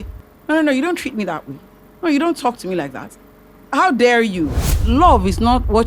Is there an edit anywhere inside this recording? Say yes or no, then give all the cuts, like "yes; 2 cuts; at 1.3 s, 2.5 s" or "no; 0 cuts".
yes; 1 cut; at 4.8 s